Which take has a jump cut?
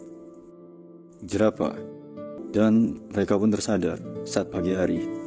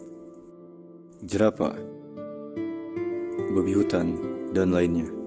first; 1 cut; at 2.3 s

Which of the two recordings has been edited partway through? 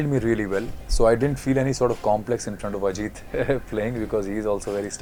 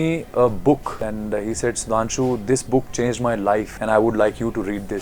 second; 2 cuts; at 1.0 s, 3.7 s

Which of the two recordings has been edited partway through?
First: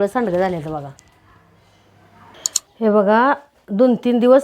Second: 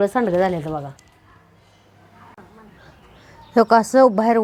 first; 1 cut; at 2.3 s

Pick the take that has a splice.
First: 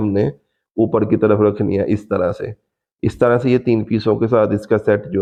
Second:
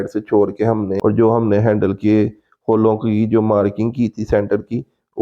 second; 1 cut; at 0.9 s

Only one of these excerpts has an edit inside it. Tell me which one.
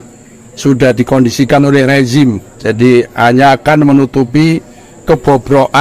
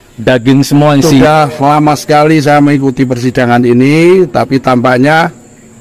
second; 1 cut; at 1.2 s

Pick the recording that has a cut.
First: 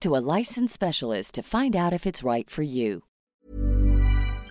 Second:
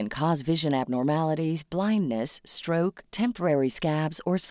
first; 1 cut; at 3.1 s

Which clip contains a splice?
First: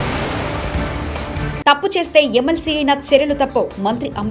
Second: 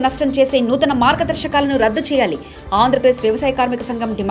first; 1 cut; at 1.5 s

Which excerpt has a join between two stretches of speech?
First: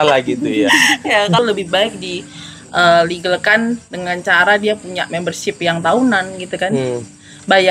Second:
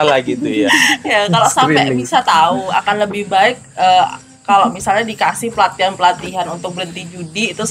first; 1 cut; at 1.4 s

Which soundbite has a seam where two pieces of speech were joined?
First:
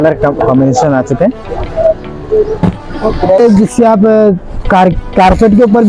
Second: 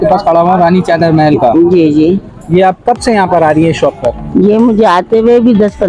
first; 1 cut; at 3.4 s

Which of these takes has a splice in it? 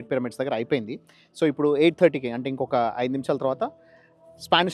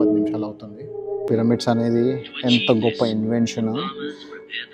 second; 1 cut; at 1.2 s

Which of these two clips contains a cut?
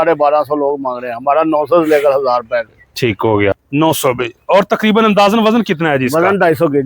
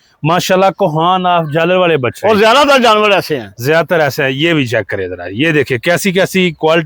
first; 1 cut; at 3.6 s

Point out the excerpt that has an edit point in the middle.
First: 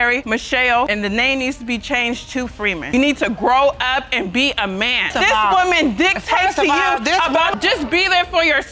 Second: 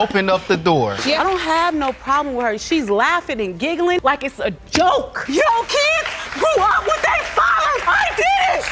second; 1 cut; at 1.0 s

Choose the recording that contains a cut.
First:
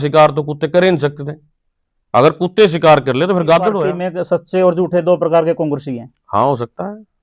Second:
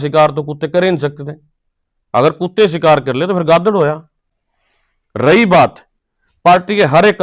first; 1 cut; at 3.9 s

